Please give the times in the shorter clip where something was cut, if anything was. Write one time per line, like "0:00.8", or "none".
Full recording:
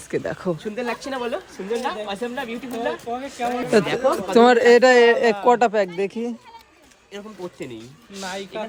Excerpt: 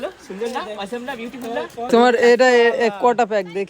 0:01.9